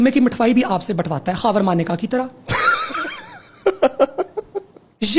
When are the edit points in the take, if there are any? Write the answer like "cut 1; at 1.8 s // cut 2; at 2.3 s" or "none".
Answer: none